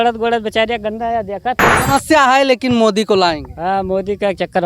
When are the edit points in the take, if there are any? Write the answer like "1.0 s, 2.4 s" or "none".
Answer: 1.7 s